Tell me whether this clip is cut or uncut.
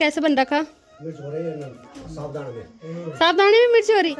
uncut